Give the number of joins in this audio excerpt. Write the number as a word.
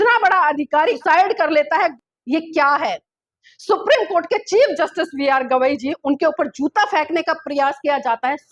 two